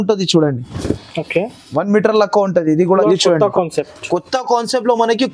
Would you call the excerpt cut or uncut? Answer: cut